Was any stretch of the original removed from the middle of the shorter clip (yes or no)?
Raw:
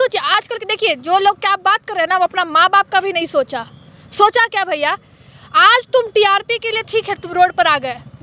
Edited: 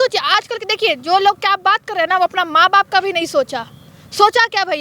no